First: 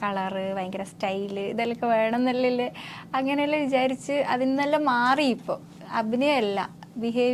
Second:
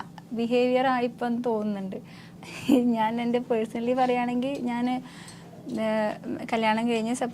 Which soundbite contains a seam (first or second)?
second